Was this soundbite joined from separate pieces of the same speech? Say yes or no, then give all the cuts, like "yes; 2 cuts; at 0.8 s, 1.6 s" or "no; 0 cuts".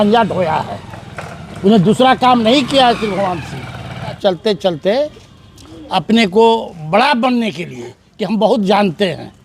yes; 1 cut; at 4.2 s